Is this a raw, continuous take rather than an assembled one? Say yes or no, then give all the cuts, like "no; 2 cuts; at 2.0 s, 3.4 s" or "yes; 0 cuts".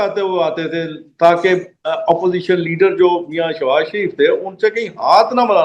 yes; 0 cuts